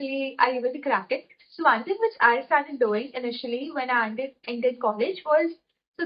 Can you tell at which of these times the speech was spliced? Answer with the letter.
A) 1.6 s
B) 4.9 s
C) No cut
C